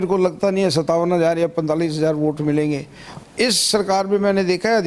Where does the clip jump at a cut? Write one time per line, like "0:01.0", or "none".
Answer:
0:03.1